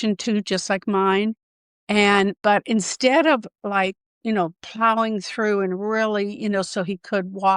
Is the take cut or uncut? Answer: cut